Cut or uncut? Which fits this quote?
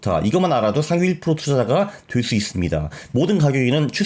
uncut